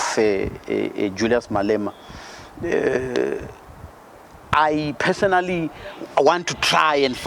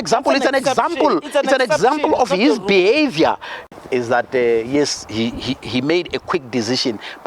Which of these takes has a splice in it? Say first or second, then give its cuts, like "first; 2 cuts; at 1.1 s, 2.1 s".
second; 1 cut; at 3.6 s